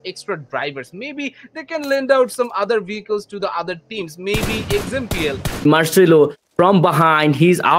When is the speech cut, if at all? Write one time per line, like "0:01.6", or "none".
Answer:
0:05.6

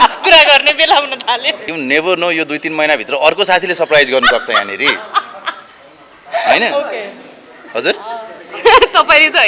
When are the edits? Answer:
0:01.7

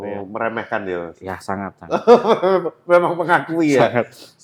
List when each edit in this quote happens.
none

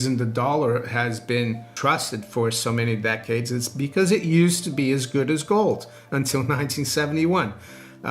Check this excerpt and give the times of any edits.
0:01.7

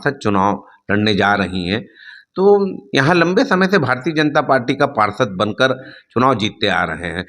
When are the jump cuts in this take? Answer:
none

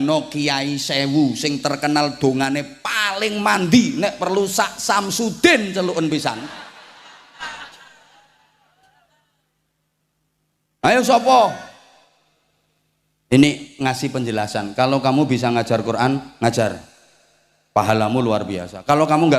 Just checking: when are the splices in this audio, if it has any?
0:11.9

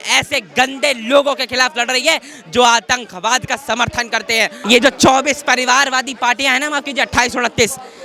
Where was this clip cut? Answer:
0:04.6

